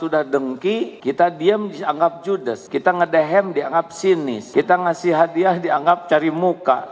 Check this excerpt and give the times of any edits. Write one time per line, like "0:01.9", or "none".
0:00.9
0:02.6
0:04.4